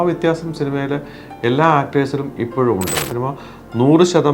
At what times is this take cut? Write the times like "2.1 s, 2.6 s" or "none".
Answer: 3.1 s